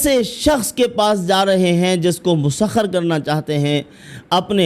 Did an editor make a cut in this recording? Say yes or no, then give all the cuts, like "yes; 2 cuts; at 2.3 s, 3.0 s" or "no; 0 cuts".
no; 0 cuts